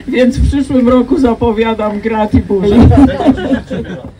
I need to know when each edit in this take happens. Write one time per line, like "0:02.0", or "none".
0:02.6